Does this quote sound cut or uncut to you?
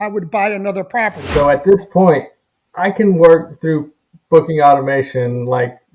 cut